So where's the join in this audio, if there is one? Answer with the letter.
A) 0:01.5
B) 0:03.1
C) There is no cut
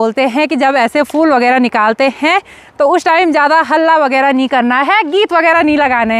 C